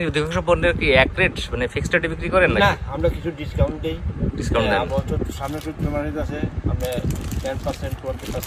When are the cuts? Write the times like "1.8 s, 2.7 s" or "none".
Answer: none